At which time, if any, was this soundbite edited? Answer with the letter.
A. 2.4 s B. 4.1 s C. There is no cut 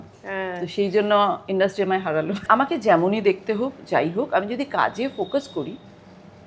A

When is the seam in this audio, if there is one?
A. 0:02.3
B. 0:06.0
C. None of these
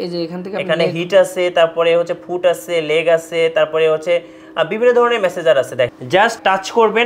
B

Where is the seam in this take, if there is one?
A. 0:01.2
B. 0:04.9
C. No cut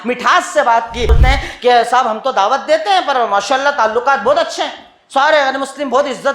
A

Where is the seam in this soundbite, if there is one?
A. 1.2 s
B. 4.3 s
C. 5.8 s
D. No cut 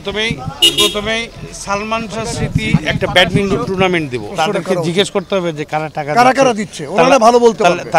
B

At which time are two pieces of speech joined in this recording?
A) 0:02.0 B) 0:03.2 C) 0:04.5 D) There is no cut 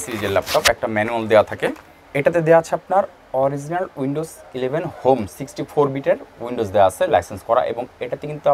A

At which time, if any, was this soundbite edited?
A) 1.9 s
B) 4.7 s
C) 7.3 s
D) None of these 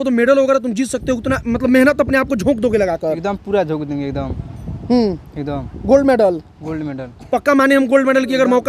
D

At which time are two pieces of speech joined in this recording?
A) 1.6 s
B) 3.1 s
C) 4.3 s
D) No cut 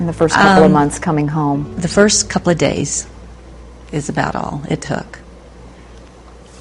B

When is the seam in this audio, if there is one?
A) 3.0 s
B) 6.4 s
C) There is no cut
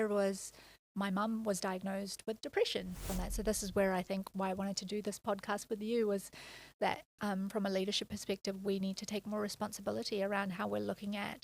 A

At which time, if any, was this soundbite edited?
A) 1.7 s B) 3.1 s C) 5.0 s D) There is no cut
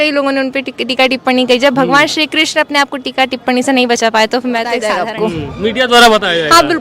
C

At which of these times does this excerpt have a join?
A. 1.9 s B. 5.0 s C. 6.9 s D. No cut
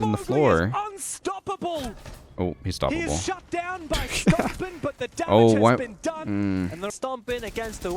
C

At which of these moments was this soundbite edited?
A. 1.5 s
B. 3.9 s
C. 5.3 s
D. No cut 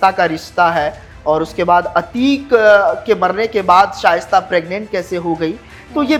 D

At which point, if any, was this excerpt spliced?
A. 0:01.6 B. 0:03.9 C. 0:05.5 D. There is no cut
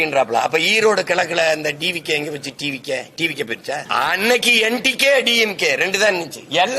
B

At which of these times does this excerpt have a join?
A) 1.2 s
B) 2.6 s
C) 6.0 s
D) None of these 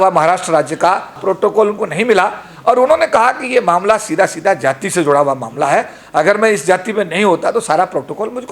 A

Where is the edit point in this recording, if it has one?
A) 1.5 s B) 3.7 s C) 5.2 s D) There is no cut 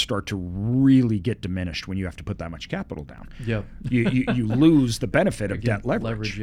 D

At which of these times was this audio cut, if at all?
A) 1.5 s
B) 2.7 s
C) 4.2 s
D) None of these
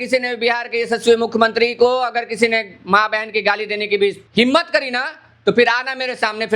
C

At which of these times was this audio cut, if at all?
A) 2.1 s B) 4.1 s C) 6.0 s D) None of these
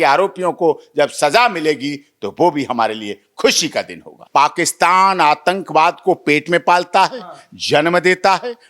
B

